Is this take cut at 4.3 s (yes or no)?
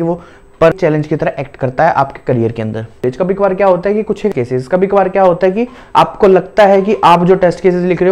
yes